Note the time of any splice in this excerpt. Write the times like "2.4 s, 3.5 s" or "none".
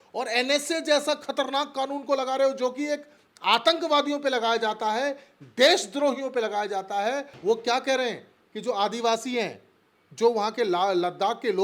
7.3 s